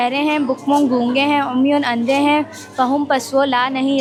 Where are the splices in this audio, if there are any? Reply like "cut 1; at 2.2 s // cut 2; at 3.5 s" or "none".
none